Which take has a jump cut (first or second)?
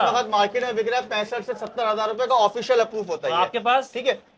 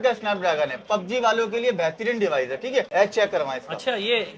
second